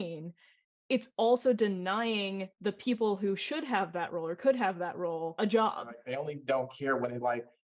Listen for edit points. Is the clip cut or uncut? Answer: cut